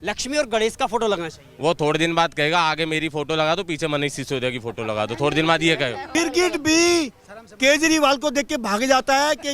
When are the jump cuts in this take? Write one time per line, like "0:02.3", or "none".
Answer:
0:06.0